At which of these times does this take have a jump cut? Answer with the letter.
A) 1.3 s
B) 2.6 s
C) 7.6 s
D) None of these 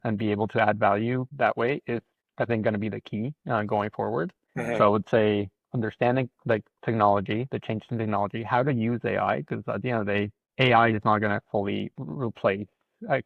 A